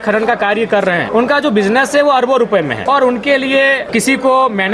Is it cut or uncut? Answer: cut